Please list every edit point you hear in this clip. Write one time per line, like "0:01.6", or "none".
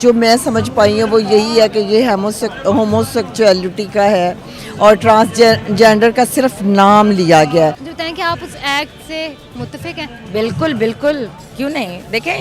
0:07.9